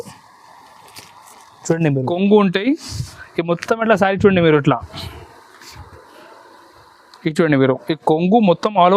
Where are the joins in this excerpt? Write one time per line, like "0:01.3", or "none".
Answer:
0:02.1

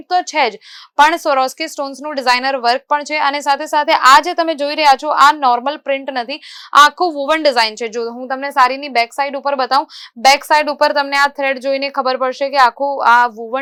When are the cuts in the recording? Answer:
none

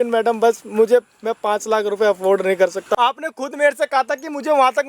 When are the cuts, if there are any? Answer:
0:02.9

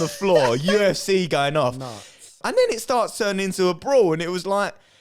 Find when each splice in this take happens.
0:02.4

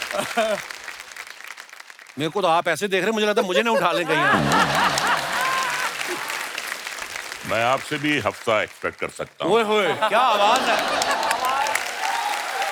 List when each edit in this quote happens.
none

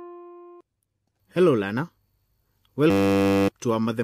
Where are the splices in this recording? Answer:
none

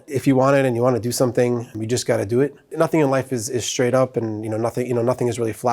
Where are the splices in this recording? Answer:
0:01.7

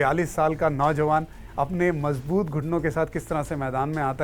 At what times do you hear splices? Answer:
none

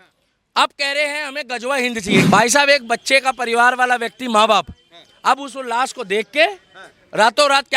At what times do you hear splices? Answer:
0:02.2

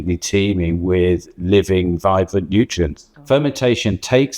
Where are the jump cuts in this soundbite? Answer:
0:03.1

